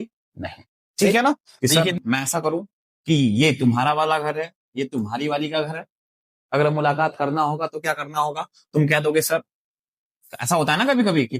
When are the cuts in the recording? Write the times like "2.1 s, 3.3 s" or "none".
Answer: 1.5 s